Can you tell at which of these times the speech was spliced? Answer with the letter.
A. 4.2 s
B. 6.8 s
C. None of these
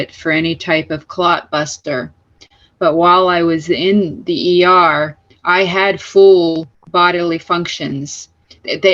B